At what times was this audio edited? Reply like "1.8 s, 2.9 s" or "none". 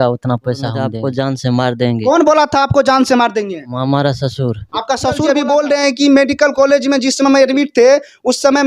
0.9 s, 5.2 s